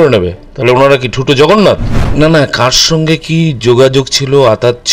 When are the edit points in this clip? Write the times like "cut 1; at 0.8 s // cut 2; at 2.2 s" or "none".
cut 1; at 2.0 s